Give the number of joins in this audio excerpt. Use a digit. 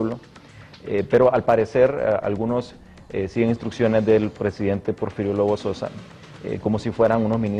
1